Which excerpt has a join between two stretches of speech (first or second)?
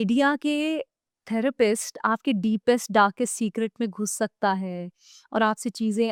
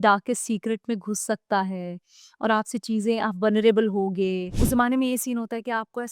second